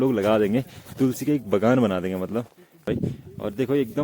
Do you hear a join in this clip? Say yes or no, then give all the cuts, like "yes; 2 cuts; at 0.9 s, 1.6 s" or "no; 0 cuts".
yes; 1 cut; at 2.9 s